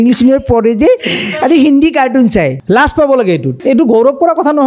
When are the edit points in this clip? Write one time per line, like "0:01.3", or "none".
0:02.6
0:03.6